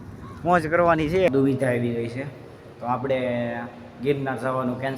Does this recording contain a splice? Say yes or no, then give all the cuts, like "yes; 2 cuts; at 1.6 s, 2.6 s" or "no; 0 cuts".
yes; 1 cut; at 1.3 s